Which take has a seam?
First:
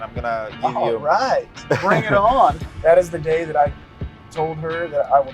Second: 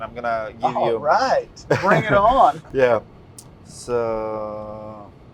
first; 1 cut; at 2.6 s

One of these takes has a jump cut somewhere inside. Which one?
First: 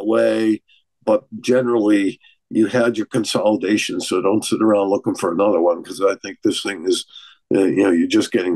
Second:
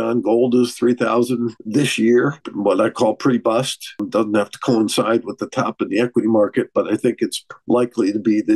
second; 4 cuts; at 1.6 s, 2.5 s, 4.1 s, 7.5 s

